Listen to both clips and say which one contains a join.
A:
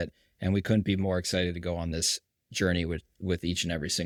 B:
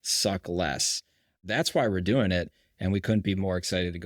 B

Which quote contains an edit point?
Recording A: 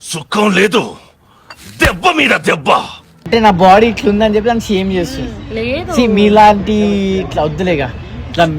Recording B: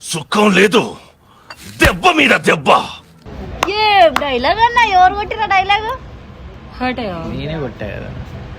A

